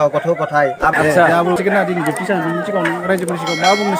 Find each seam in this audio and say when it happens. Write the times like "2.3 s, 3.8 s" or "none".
0.9 s, 1.6 s